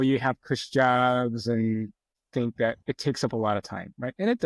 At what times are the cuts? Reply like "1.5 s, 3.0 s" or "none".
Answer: 2.1 s

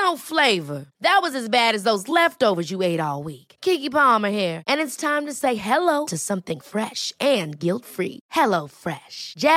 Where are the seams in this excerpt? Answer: none

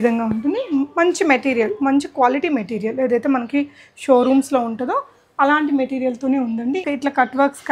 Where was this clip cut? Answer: 6.8 s

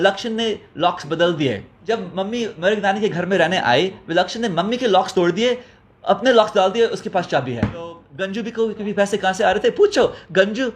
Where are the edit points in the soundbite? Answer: 1.7 s, 8.1 s

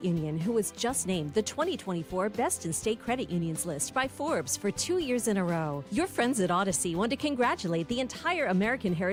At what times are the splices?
none

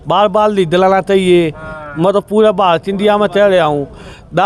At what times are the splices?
none

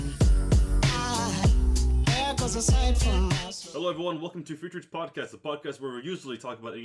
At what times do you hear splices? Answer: none

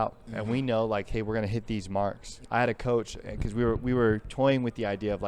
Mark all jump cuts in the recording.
2.3 s

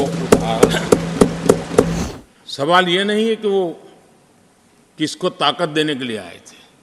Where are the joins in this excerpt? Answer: 1.9 s

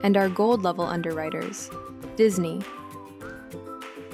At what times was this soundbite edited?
2.7 s

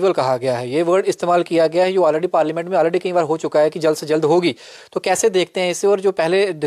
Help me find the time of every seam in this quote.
none

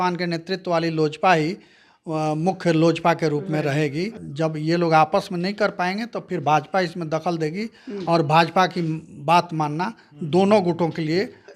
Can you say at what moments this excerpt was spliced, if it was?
4.2 s

